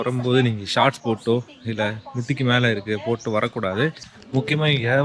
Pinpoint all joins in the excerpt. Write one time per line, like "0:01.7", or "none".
0:04.1